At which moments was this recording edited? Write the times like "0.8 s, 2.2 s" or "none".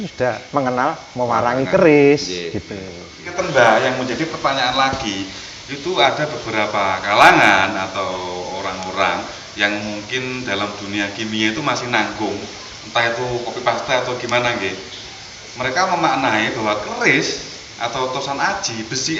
3.4 s